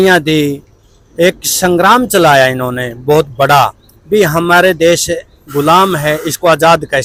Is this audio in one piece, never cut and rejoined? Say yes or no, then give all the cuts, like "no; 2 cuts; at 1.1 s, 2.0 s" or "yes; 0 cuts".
yes; 0 cuts